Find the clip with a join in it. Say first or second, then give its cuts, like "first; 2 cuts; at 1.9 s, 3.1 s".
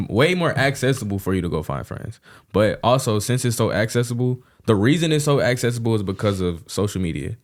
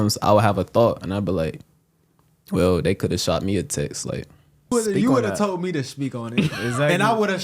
second; 1 cut; at 4.7 s